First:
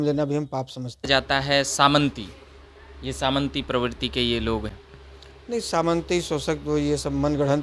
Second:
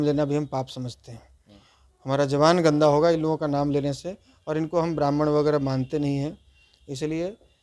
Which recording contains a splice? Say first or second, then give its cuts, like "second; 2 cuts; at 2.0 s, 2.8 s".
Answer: first; 2 cuts; at 1.1 s, 4.7 s